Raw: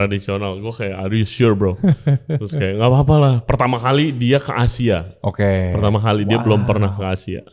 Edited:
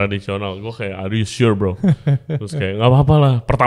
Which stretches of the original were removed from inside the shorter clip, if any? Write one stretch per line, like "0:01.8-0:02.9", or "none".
none